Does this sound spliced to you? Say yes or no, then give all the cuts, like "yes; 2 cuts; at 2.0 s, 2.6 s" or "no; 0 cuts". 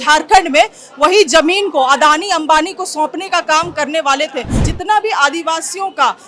yes; 1 cut; at 4.7 s